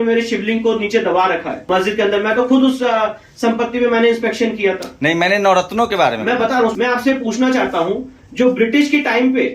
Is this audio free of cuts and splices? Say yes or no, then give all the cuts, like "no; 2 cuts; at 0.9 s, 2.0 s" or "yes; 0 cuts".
no; 2 cuts; at 1.5 s, 6.7 s